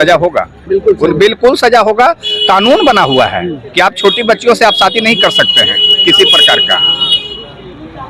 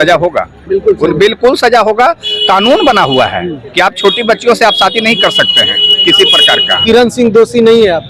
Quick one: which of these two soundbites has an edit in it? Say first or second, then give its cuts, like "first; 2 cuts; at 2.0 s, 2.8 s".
second; 1 cut; at 6.8 s